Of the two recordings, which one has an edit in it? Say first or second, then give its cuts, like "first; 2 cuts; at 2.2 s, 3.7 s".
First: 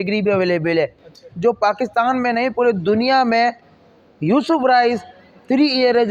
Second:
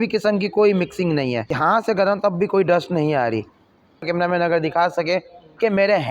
second; 2 cuts; at 1.5 s, 4.0 s